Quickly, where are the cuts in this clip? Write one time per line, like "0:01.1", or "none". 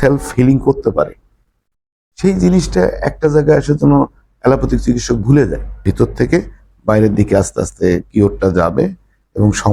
0:05.8